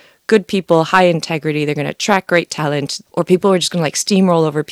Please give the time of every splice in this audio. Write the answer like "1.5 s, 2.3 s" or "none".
2.9 s